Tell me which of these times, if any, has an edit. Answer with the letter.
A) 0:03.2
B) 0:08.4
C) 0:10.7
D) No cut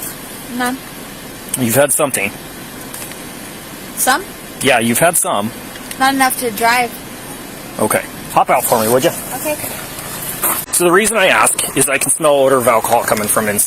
C